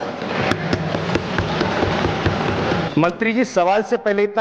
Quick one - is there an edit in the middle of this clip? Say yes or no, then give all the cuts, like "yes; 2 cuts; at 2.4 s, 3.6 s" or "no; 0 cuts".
yes; 1 cut; at 2.9 s